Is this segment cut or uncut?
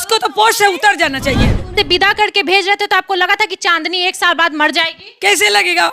cut